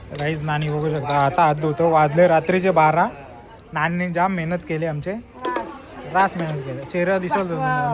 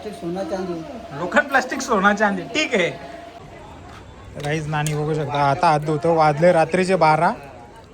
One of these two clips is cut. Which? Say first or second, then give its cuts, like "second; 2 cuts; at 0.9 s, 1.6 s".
second; 1 cut; at 3.3 s